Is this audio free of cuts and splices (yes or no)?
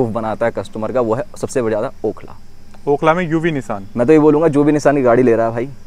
yes